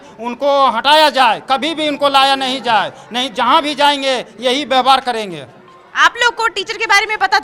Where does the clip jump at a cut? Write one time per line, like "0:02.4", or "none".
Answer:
none